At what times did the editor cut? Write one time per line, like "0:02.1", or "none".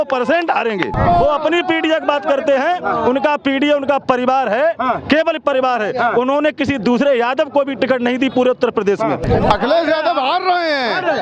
0:00.9
0:09.2